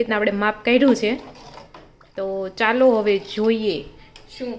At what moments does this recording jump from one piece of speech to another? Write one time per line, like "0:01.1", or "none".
none